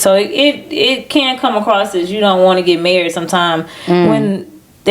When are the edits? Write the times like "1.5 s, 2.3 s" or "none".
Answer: none